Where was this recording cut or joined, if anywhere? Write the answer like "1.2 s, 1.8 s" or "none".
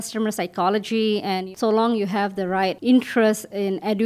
1.5 s, 2.8 s